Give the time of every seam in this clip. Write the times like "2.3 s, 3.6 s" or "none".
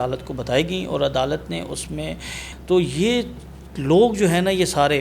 2.5 s